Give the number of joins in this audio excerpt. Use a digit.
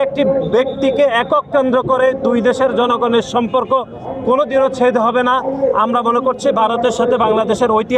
0